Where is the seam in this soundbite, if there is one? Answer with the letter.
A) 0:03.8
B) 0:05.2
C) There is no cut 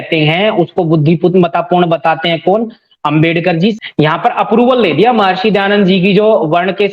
A